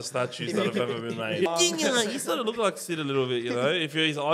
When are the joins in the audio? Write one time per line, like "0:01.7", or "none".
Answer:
0:01.5